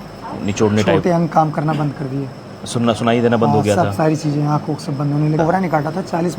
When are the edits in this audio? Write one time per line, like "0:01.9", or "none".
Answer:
0:05.4